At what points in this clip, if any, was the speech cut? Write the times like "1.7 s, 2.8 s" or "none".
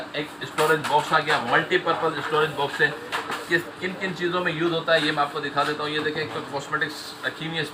none